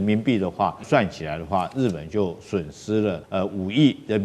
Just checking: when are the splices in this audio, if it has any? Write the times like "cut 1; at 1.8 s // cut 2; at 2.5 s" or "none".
cut 1; at 0.8 s // cut 2; at 3.2 s